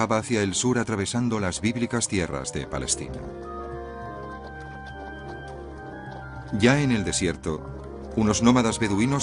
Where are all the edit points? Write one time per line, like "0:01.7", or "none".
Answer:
0:03.8